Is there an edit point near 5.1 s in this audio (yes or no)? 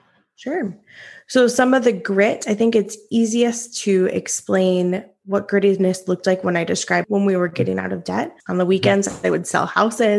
no